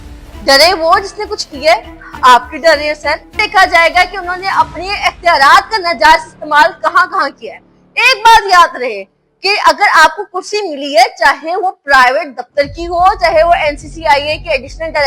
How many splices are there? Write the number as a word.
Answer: one